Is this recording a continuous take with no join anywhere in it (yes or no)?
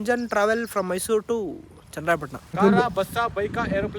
no